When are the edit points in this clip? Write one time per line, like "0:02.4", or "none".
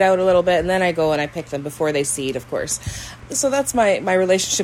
0:03.1